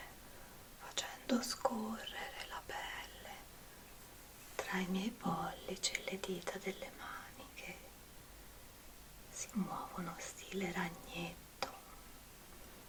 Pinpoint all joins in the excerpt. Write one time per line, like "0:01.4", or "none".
none